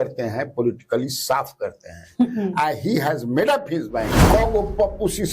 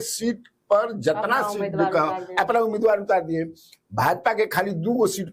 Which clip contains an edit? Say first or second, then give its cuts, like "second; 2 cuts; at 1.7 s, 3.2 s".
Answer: first; 1 cut; at 4.2 s